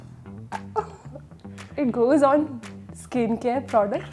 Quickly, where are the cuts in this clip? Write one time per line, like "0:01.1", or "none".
none